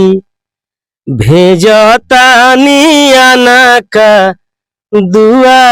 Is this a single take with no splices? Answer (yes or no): yes